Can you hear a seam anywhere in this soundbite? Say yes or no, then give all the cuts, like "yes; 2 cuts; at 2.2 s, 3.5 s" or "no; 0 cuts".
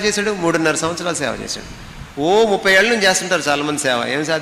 no; 0 cuts